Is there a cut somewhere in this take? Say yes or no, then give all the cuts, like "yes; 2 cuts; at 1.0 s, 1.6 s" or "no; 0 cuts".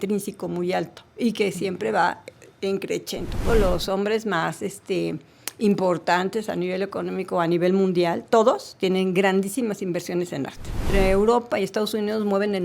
yes; 2 cuts; at 3.5 s, 10.8 s